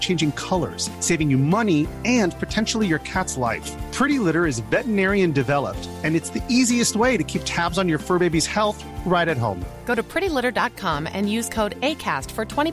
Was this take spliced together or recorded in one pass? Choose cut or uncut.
uncut